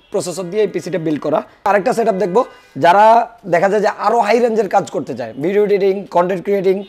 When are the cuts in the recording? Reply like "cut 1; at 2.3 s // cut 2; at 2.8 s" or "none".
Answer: cut 1; at 1.7 s